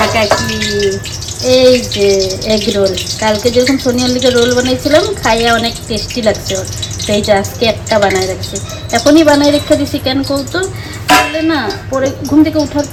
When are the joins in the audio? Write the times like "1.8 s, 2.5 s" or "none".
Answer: none